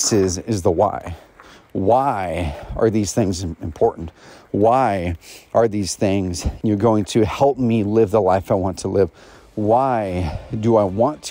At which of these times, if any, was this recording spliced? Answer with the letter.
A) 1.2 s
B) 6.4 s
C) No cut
B